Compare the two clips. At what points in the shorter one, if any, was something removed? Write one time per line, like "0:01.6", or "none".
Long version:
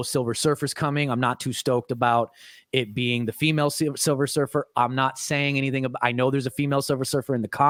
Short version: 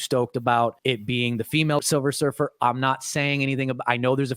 0:00.8
0:01.8